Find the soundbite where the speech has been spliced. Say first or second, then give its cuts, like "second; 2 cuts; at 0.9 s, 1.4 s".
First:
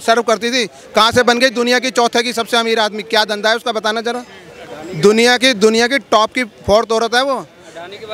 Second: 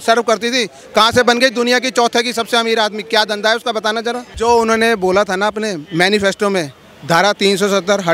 second; 1 cut; at 4.3 s